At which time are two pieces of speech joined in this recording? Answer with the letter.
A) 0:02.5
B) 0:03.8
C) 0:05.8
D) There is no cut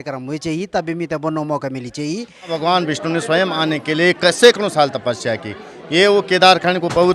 A